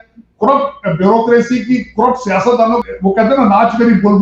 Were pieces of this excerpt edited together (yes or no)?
yes